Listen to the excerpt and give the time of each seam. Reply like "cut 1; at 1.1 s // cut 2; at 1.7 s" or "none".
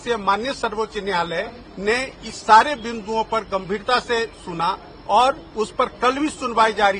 none